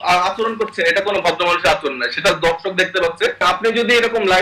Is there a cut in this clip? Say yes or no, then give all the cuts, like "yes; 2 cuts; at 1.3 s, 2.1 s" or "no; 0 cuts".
yes; 1 cut; at 3.4 s